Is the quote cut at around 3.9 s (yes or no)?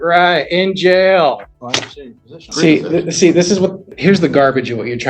yes